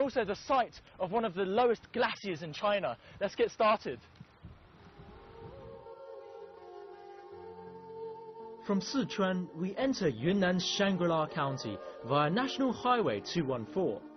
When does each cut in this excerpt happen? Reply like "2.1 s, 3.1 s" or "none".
6.6 s

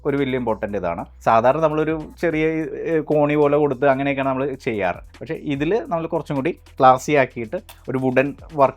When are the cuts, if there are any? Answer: none

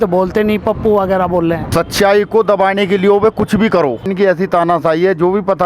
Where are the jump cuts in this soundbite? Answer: 1.7 s, 4.1 s

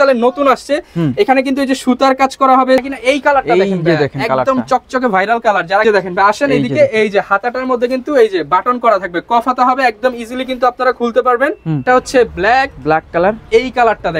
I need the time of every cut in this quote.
2.8 s, 5.8 s, 11.8 s

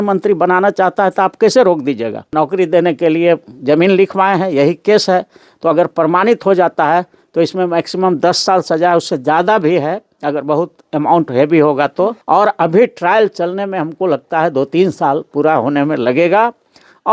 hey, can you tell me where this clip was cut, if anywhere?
2.3 s, 12.2 s

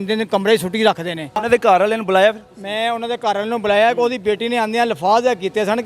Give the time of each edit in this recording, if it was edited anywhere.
1.4 s

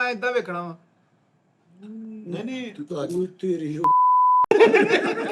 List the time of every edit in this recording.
2.9 s

